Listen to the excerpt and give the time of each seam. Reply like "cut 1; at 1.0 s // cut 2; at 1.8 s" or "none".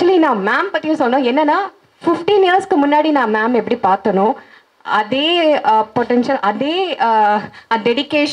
none